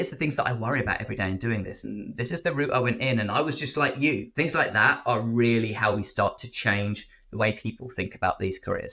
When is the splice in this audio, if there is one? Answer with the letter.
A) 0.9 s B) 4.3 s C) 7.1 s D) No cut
B